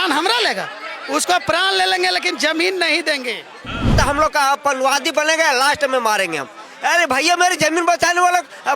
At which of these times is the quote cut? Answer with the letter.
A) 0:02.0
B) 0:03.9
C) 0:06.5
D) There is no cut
B